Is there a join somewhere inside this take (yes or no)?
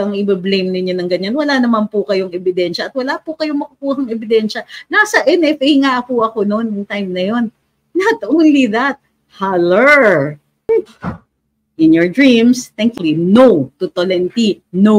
yes